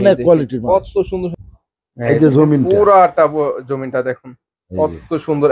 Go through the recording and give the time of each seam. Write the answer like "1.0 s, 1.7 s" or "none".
1.4 s